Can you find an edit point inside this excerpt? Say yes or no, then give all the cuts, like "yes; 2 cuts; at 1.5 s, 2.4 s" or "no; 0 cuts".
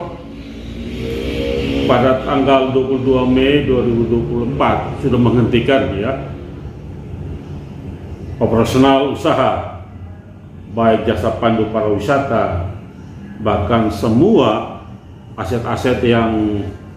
no; 0 cuts